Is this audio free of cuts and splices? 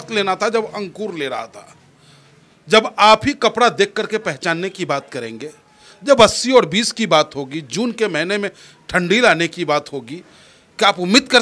yes; 0 cuts

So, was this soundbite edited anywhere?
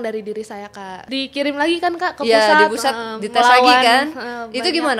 yes; 1 cut; at 0.9 s

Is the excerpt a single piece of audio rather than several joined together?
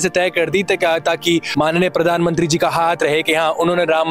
yes; 0 cuts

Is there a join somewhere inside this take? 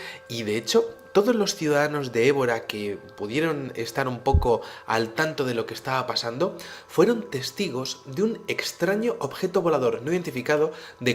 yes; 1 cut; at 2.7 s

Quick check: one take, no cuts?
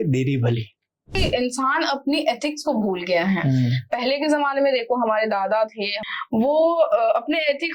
no; 2 cuts; at 1.2 s, 6.0 s

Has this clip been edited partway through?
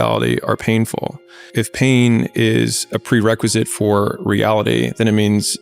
yes; 1 cut; at 1.5 s

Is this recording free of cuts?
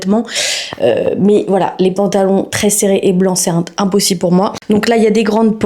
yes; 0 cuts

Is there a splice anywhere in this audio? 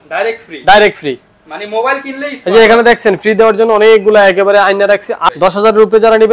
yes; 1 cut; at 5.2 s

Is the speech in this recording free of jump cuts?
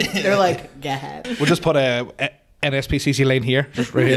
no; 1 cut; at 1.2 s

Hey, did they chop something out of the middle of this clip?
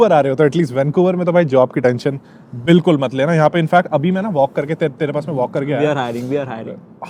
no; 0 cuts

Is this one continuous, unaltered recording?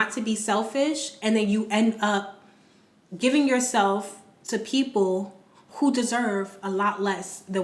yes; 0 cuts

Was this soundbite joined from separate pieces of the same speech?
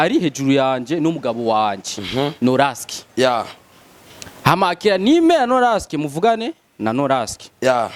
no; 0 cuts

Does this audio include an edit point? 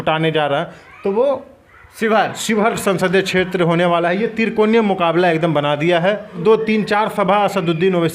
yes; 1 cut; at 6.4 s

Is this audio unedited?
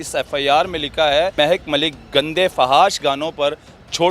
no; 1 cut; at 1.3 s

